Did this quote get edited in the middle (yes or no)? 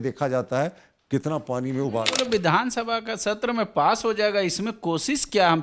yes